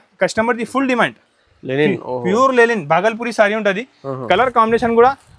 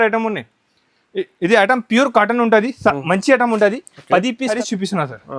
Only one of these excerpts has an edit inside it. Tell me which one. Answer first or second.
second